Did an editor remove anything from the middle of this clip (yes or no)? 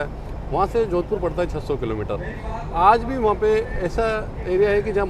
no